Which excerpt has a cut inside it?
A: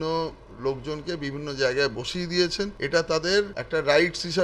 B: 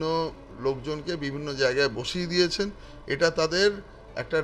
A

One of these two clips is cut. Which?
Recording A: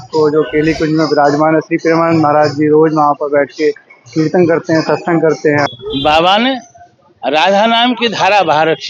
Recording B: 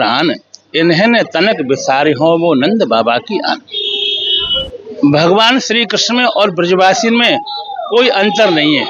A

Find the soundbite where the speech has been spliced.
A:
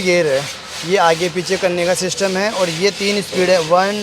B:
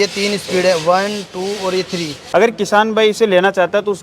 B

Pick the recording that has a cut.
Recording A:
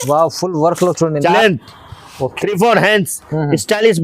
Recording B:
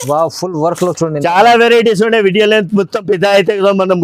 A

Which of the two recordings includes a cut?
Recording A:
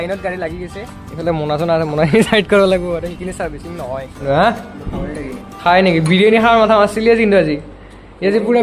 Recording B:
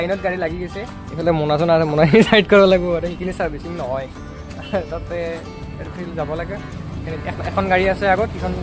A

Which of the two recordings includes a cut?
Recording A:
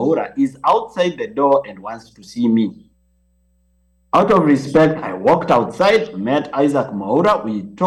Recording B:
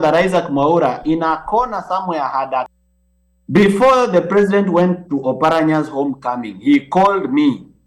B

